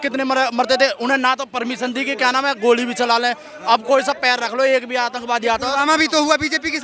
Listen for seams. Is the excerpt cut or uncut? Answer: uncut